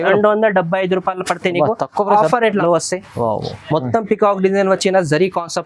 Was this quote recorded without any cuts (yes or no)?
no